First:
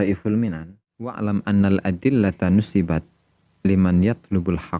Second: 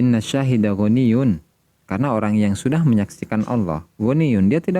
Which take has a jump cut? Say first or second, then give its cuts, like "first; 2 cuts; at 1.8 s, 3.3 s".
first; 1 cut; at 1.2 s